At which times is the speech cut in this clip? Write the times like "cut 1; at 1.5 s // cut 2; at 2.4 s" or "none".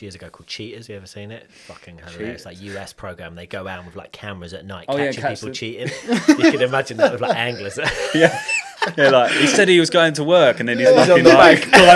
none

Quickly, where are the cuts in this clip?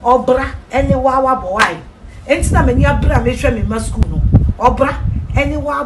none

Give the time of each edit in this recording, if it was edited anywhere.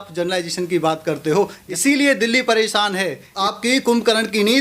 cut 1; at 1.7 s // cut 2; at 3.3 s

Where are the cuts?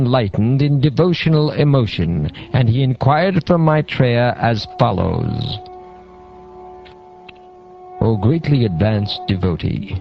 none

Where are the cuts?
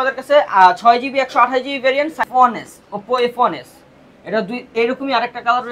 cut 1; at 2.3 s

